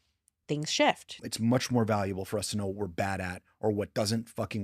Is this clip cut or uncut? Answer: cut